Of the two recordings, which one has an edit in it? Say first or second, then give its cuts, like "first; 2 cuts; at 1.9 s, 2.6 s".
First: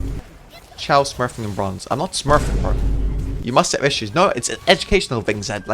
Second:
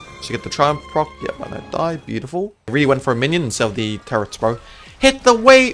second; 1 cut; at 2.7 s